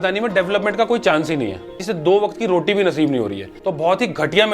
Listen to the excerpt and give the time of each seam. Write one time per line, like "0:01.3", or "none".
0:01.8
0:03.6